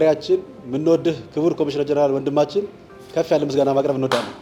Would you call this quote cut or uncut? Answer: uncut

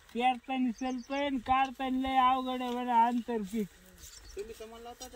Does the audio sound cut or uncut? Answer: uncut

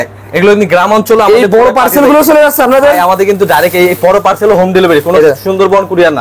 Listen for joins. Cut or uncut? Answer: uncut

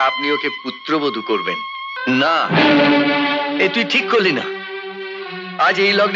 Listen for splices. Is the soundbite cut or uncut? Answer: cut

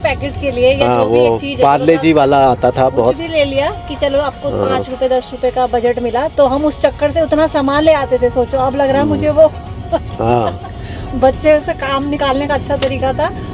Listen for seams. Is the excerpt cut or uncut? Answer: uncut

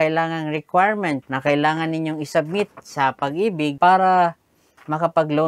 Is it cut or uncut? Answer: cut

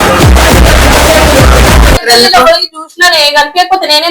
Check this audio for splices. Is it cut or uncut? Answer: cut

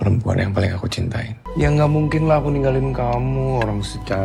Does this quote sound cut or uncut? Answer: uncut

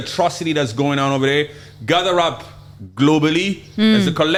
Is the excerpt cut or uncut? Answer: uncut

